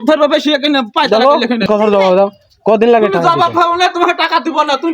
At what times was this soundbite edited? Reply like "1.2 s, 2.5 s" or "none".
1.7 s